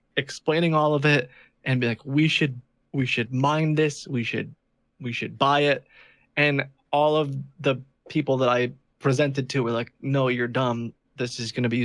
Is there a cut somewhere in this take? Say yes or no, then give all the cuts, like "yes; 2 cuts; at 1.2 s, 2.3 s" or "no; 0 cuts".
no; 0 cuts